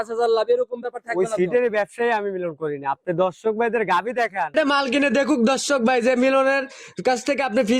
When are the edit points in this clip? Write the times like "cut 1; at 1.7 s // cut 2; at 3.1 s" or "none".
cut 1; at 4.5 s